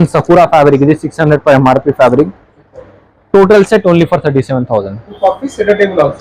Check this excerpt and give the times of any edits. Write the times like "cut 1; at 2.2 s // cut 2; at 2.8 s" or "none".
none